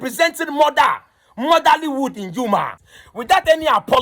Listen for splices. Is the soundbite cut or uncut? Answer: cut